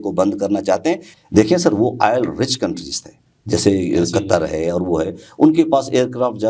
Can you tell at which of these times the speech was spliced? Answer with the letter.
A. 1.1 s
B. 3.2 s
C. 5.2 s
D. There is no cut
A